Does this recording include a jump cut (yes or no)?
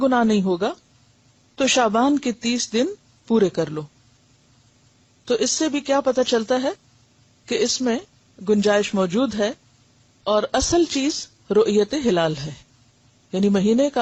no